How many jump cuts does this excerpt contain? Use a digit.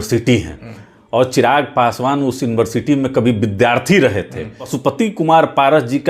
1